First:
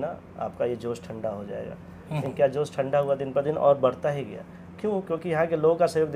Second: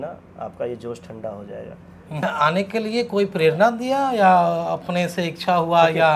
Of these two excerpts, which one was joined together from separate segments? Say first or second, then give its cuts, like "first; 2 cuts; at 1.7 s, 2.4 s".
second; 1 cut; at 2.2 s